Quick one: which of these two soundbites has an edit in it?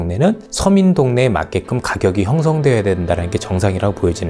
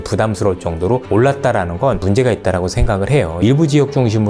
second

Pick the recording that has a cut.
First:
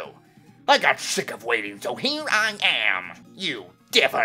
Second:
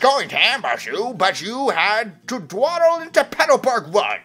first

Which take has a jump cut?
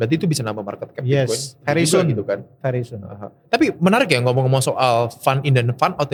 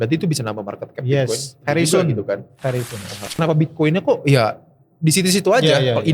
second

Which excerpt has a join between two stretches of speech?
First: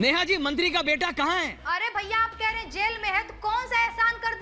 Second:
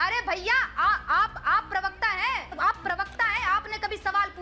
second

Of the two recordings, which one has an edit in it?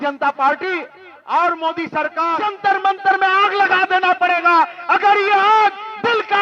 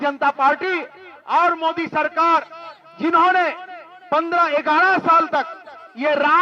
first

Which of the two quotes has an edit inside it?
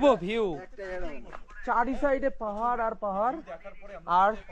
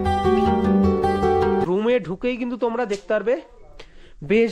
second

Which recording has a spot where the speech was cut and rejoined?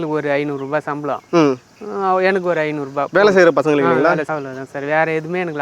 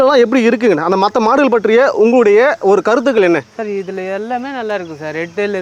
first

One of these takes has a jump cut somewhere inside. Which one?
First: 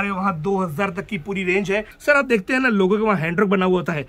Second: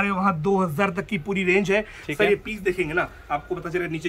first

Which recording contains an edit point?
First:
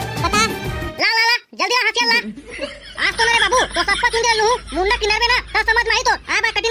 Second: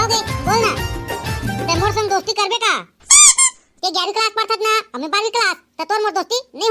first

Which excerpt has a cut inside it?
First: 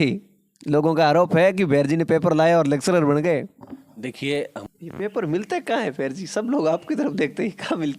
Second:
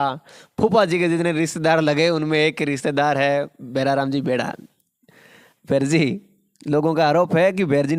first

